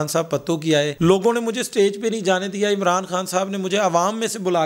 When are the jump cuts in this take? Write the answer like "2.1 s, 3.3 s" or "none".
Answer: none